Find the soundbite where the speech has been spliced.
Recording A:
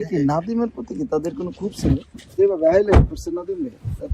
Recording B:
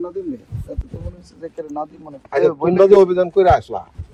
A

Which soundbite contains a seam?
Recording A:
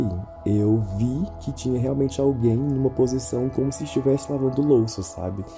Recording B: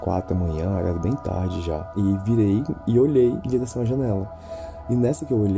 B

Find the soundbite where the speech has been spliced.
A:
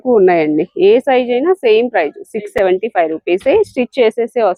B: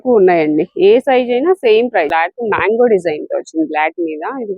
B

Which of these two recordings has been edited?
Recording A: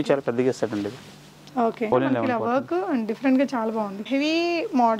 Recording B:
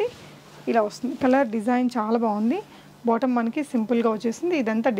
A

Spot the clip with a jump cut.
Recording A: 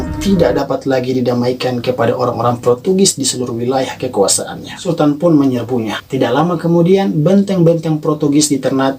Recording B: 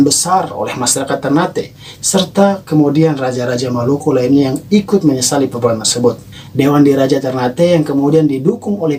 A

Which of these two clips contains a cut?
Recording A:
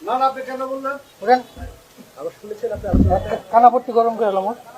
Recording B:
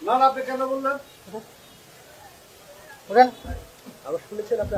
A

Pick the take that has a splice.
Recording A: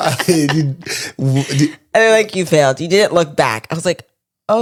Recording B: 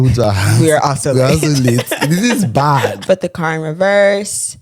B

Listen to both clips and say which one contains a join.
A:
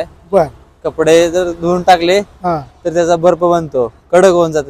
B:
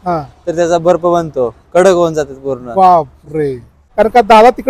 B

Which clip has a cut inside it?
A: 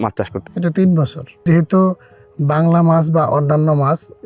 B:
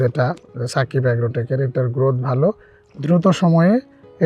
A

